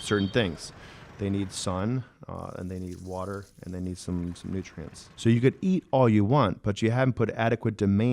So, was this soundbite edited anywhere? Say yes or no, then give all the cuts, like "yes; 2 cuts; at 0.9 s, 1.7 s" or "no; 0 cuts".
yes; 1 cut; at 5.0 s